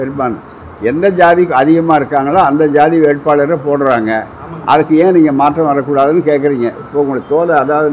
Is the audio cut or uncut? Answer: uncut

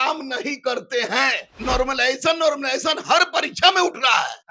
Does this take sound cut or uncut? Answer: cut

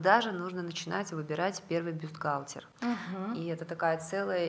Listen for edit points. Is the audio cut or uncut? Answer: uncut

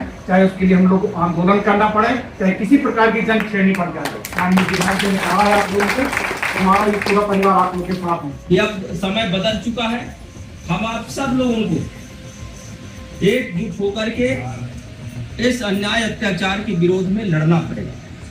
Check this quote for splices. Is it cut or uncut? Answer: cut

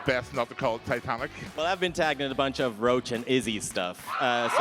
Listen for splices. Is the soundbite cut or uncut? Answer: cut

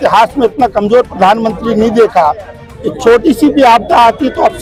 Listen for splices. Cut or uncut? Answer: uncut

